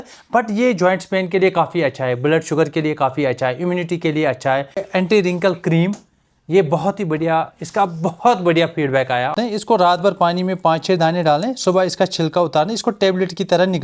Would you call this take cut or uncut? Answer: cut